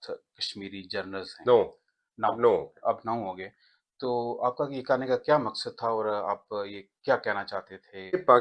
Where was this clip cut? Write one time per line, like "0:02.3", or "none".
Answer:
none